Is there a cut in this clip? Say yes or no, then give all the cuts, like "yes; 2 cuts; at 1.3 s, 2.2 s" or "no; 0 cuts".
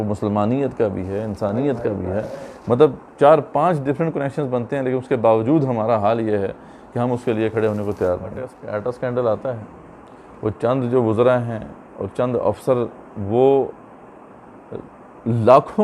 yes; 1 cut; at 8.6 s